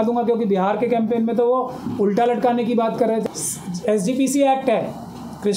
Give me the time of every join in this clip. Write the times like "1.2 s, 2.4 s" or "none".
3.2 s